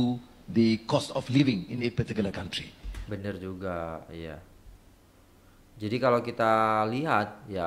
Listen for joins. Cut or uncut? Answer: uncut